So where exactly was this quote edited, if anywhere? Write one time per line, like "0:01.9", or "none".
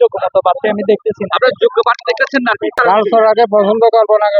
0:02.8